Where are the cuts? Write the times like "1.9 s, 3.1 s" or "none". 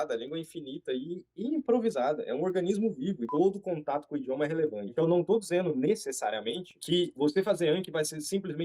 3.3 s, 4.9 s